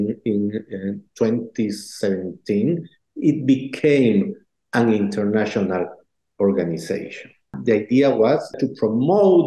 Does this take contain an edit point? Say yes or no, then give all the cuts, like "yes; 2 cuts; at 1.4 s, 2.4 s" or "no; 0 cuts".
yes; 2 cuts; at 7.5 s, 8.5 s